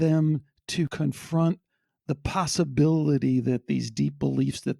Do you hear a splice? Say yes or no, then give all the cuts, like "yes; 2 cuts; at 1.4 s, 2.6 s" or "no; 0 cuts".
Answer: yes; 1 cut; at 0.9 s